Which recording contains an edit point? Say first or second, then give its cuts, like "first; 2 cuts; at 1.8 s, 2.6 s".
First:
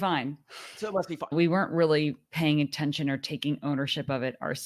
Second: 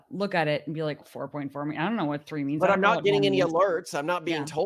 first; 1 cut; at 1.2 s